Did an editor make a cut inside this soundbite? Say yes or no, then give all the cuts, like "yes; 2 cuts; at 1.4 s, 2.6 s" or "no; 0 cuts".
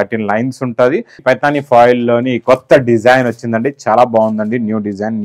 yes; 1 cut; at 1.2 s